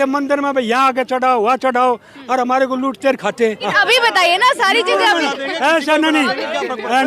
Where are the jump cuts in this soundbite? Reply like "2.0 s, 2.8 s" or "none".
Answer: 3.7 s